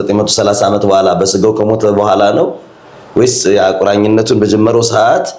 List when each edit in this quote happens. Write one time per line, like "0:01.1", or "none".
none